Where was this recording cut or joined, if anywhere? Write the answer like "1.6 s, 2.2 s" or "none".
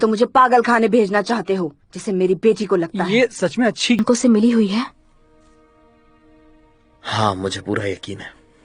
4.0 s